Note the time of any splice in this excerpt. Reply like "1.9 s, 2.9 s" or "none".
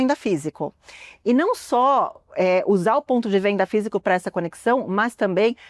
none